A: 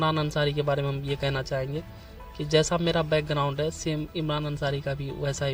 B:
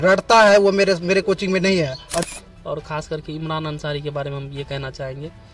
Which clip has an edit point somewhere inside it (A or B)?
B